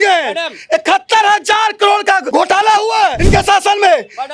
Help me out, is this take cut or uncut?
cut